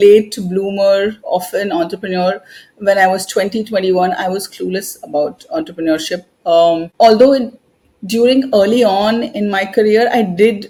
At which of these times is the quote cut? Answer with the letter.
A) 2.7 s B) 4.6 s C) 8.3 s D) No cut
D